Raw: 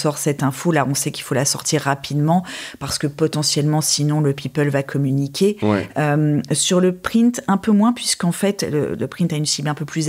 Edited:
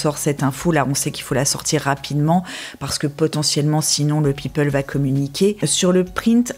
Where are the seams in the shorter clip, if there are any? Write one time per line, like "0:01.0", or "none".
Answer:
0:05.6